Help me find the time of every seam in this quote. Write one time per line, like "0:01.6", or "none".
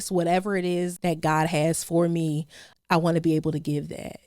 0:00.9
0:02.7